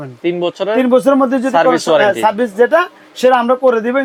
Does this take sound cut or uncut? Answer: uncut